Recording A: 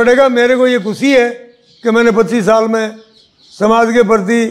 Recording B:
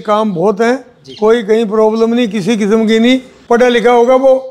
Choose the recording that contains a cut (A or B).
B